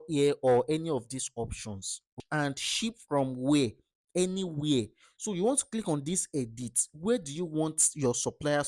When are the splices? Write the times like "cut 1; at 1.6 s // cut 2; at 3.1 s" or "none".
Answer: cut 1; at 2.2 s